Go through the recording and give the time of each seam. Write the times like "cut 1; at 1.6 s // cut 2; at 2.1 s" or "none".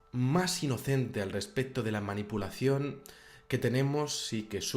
cut 1; at 1.0 s